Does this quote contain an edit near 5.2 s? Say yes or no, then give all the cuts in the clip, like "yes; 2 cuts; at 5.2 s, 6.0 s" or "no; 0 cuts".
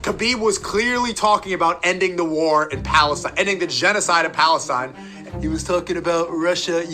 yes; 1 cut; at 5.2 s